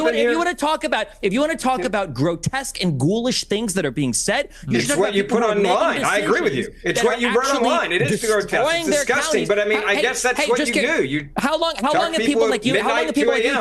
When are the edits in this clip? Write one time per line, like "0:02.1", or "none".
0:01.5